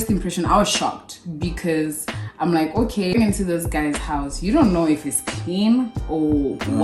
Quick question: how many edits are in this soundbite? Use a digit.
1